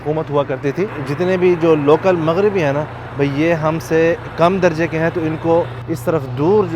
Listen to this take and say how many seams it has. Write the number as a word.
two